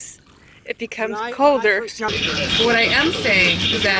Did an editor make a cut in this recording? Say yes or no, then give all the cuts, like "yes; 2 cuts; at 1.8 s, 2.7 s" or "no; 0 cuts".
yes; 1 cut; at 2.2 s